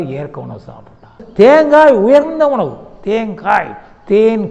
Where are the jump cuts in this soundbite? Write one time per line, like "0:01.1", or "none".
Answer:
0:01.2